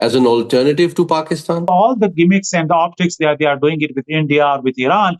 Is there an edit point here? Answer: yes; 1 cut; at 1.7 s

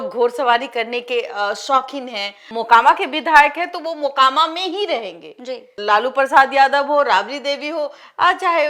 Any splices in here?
yes; 2 cuts; at 2.4 s, 5.8 s

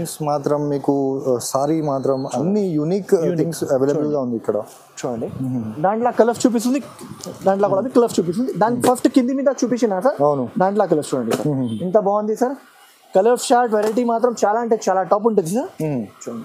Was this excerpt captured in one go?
yes; 0 cuts

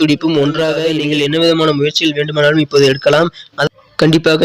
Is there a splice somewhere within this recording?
yes; 1 cut; at 0.9 s

